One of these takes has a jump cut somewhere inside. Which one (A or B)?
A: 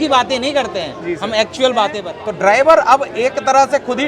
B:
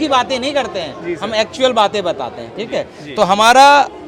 A